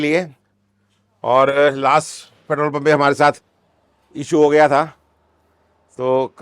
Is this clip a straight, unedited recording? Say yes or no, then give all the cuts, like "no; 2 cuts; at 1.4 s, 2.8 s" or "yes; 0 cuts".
yes; 0 cuts